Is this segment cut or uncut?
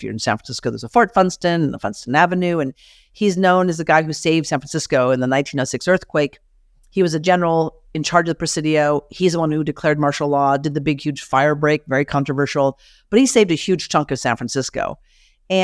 uncut